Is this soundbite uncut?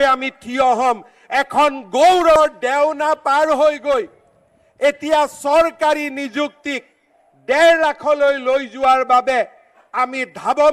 no; 1 cut; at 2.3 s

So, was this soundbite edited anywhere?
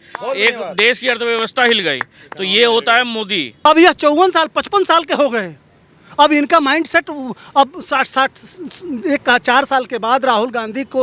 yes; 1 cut; at 3.4 s

